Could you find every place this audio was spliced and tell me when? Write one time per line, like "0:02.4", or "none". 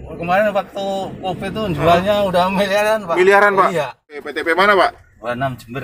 0:04.3

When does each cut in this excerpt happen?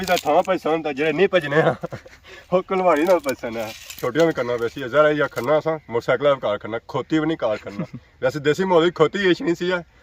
0:04.0

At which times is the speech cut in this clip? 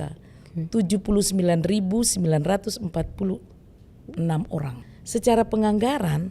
0:04.8

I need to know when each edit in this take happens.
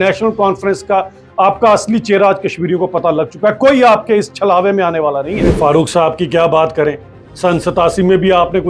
0:05.4

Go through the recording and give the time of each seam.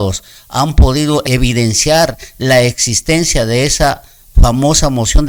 none

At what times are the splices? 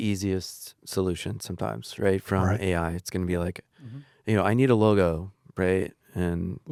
none

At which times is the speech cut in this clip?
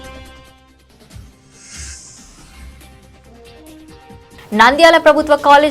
0:02.8

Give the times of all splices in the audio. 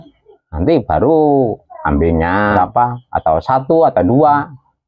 0:02.5

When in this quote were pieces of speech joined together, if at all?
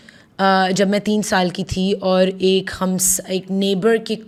none

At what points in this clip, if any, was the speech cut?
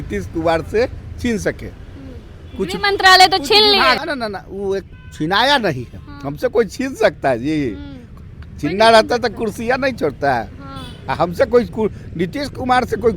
0:04.0

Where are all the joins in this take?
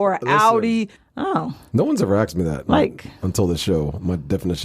0:01.0

